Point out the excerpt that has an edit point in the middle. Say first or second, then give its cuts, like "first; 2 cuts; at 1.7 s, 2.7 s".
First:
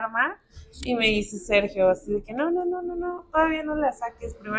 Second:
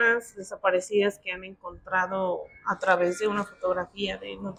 first; 1 cut; at 3.2 s